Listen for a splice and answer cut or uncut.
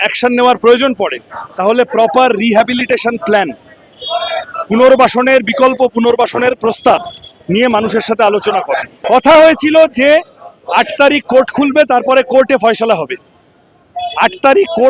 cut